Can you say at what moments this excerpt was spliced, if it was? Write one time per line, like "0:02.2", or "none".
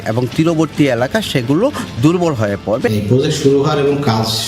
0:02.9